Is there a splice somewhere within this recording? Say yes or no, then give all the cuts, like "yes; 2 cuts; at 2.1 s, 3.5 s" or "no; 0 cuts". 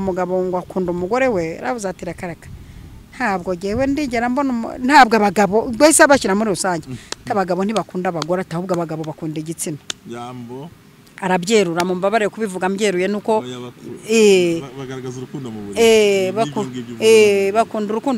no; 0 cuts